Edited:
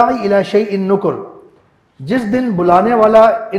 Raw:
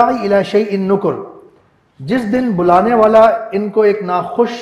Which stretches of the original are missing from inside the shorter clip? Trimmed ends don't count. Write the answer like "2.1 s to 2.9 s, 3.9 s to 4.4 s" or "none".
none